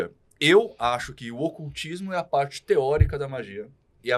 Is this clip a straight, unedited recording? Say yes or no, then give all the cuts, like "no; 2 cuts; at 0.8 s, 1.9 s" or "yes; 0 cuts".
yes; 0 cuts